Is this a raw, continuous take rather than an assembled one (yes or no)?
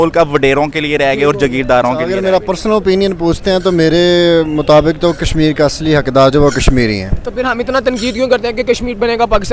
no